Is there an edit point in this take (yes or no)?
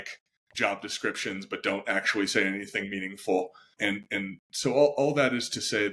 no